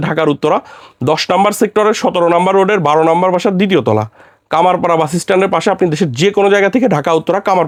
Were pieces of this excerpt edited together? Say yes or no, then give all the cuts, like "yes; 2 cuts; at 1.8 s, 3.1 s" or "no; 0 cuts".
no; 0 cuts